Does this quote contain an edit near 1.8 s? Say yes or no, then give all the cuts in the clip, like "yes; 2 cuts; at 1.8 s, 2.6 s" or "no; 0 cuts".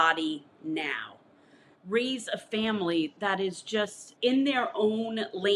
yes; 2 cuts; at 1.8 s, 4.0 s